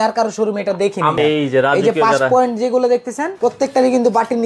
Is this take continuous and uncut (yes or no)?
no